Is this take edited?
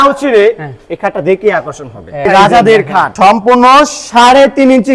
yes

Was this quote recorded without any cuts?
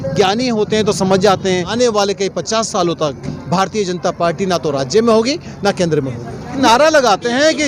no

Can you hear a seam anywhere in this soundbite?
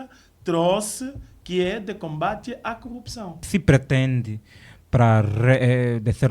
yes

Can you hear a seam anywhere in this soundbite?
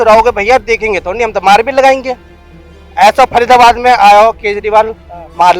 no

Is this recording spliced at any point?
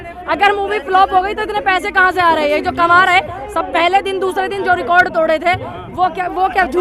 no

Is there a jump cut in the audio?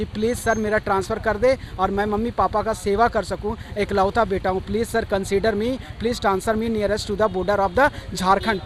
no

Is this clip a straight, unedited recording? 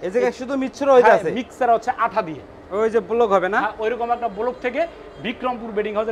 no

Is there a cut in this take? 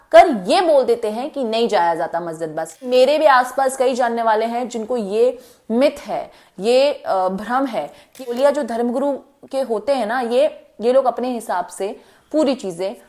yes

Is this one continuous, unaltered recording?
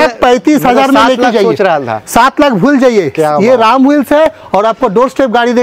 yes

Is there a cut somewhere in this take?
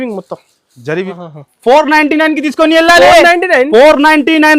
yes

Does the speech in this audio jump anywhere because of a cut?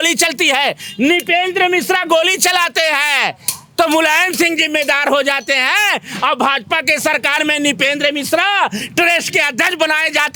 no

